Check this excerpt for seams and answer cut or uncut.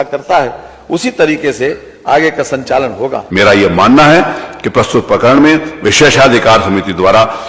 cut